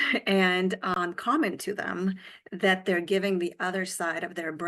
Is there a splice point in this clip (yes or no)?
yes